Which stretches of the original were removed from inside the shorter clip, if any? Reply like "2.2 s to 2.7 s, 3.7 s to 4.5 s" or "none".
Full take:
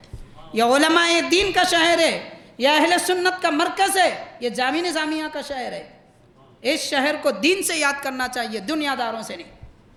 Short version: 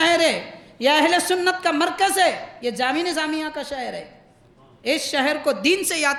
none